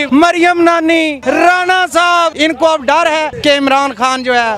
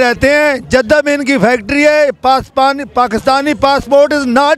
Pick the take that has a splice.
first; 3 cuts; at 1.2 s, 2.3 s, 3.3 s

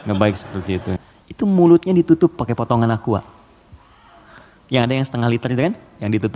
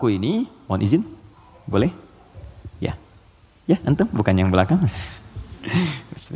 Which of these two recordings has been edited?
first; 1 cut; at 1.1 s

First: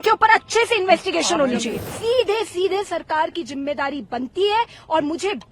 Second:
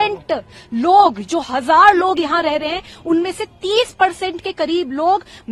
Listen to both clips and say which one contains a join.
first; 1 cut; at 1.8 s

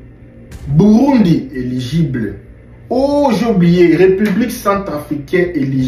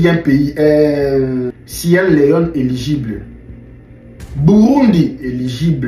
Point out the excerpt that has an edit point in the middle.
second; 1 cut; at 1.6 s

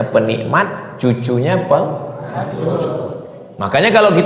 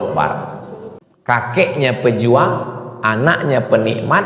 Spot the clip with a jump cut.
second; 1 cut; at 1.1 s

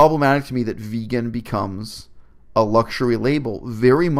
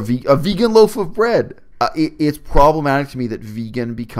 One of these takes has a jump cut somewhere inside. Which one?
second; 1 cut; at 1.6 s

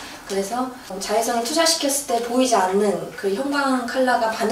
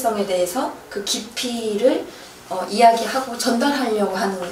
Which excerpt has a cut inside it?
first; 1 cut; at 1.0 s

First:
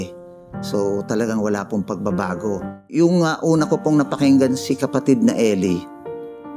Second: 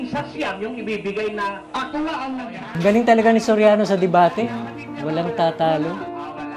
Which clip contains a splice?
first; 1 cut; at 2.8 s

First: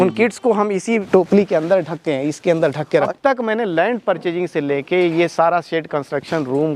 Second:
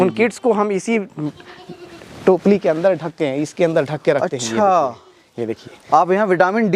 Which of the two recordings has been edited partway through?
first; 2 cuts; at 1.1 s, 3.1 s

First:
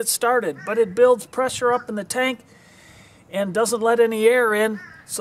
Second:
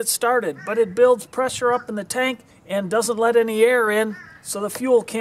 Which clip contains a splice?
second; 1 cut; at 2.5 s

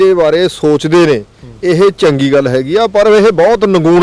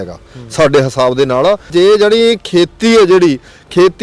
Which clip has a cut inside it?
second; 1 cut; at 1.7 s

